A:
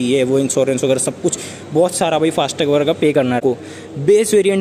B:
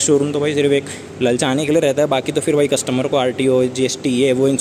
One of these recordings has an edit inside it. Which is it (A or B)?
A